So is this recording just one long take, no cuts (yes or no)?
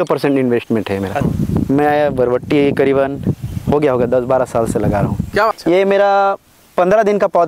no